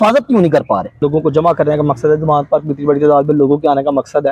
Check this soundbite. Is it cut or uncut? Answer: cut